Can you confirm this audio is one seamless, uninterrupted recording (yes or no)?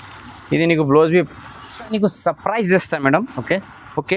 no